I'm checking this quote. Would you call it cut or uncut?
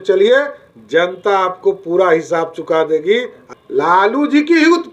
cut